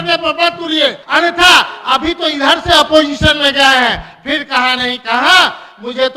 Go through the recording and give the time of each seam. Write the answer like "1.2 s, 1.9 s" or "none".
1.0 s

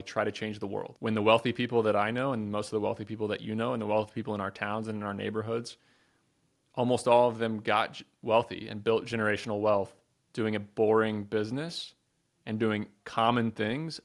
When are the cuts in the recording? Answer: 0.9 s

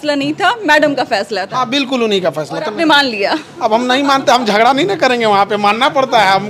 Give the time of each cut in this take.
none

